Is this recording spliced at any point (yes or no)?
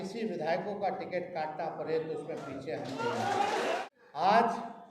yes